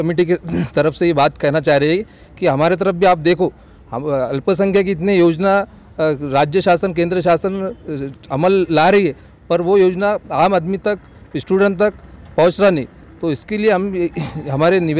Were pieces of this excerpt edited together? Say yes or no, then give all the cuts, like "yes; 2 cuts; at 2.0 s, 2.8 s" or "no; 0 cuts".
no; 0 cuts